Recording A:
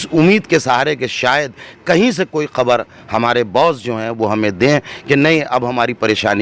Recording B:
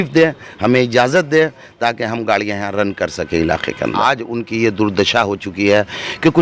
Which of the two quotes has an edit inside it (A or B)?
B